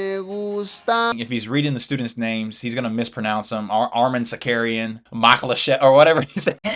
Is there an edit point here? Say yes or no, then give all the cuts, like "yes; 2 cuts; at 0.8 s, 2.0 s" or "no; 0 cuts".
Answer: yes; 2 cuts; at 1.1 s, 5.0 s